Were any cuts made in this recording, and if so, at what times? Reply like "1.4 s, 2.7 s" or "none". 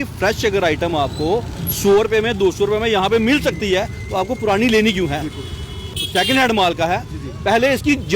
5.9 s